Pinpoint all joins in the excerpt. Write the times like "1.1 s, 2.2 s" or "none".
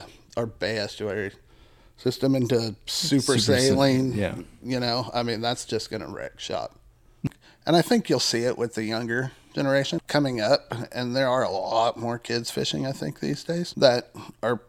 7.2 s, 9.9 s, 13.7 s